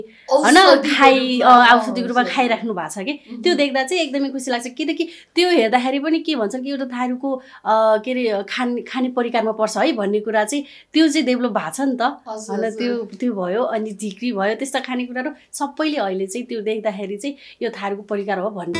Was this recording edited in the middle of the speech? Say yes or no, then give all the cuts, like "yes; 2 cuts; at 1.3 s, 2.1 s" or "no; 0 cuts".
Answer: no; 0 cuts